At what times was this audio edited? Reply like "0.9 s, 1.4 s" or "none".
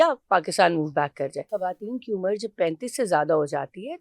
1.5 s